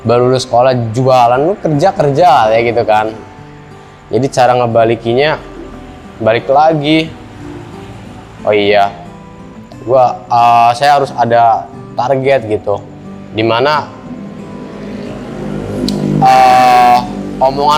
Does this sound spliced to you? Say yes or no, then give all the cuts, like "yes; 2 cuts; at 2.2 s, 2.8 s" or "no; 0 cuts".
no; 0 cuts